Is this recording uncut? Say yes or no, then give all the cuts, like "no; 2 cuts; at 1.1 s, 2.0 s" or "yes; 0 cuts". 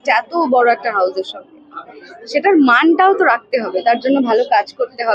yes; 0 cuts